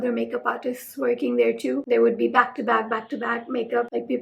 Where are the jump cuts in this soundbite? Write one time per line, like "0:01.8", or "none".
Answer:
0:01.9

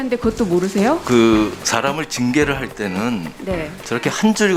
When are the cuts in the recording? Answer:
none

